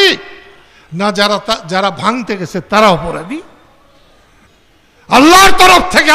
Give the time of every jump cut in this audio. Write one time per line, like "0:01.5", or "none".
0:04.5